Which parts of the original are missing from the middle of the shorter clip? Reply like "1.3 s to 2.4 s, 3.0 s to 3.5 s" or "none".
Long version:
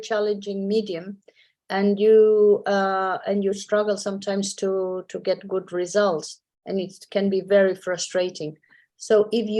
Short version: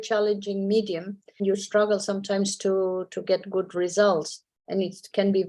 1.4 s to 3.4 s